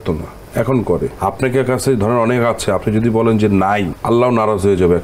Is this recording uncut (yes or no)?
no